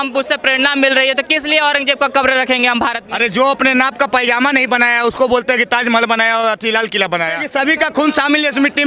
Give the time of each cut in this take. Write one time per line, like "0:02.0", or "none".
0:03.0
0:07.4